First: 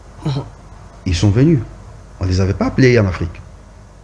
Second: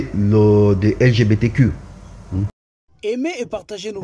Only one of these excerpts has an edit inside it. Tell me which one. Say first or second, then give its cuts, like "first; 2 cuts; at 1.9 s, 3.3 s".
second; 1 cut; at 2.6 s